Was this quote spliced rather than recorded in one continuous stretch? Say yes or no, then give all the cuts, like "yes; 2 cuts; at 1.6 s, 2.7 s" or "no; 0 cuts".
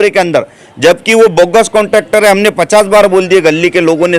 no; 0 cuts